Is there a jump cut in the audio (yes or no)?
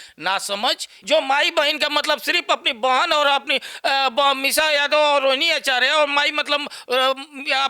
yes